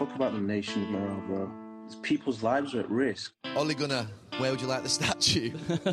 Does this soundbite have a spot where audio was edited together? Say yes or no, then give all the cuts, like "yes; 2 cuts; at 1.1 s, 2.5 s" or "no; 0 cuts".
no; 0 cuts